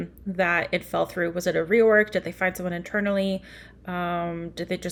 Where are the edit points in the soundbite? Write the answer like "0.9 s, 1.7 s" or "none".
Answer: none